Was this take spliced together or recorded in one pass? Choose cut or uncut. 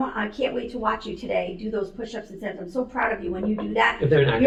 uncut